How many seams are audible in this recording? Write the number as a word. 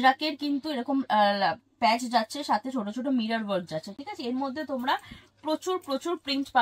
zero